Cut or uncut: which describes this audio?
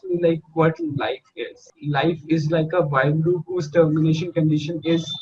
cut